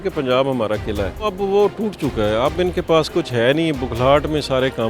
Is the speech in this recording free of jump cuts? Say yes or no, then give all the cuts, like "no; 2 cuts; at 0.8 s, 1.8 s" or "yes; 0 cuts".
no; 1 cut; at 1.3 s